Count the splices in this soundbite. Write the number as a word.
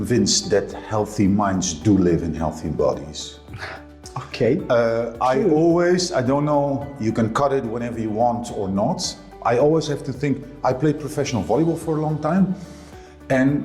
zero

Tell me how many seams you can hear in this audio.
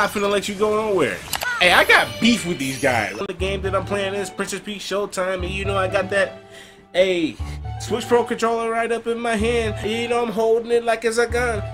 three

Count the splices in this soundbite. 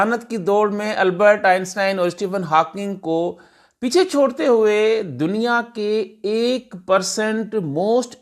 zero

